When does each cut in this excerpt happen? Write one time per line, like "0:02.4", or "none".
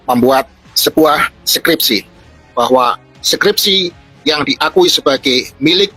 0:02.5

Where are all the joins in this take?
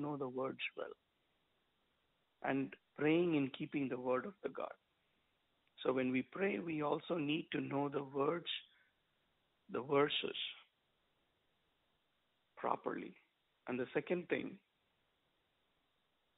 0:02.3

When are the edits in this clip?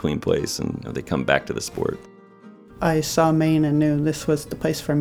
0:00.9
0:02.5

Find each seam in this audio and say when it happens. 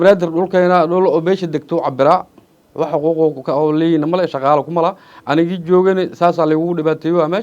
none

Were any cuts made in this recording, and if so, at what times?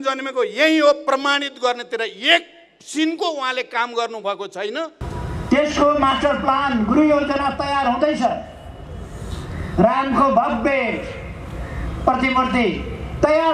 0:05.0

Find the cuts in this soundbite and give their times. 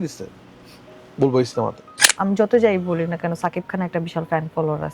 0:01.9

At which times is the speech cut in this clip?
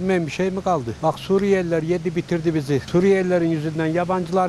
0:00.9
0:02.9

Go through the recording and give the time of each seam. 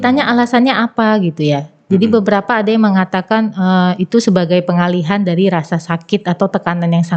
none

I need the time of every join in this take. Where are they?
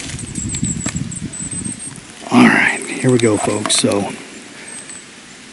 0:01.9

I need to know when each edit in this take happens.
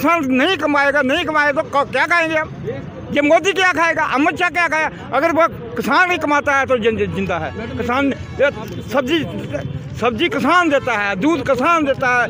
none

